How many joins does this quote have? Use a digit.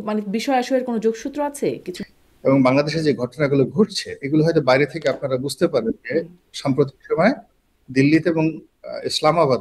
1